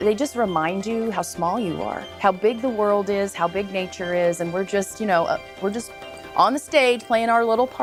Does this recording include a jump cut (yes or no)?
no